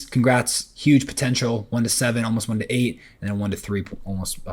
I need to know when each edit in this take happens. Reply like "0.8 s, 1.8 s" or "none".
none